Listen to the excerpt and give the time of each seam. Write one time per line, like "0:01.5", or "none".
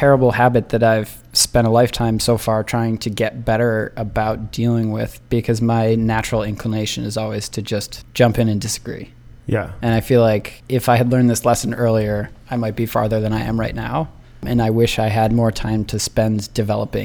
0:08.0
0:10.5
0:14.4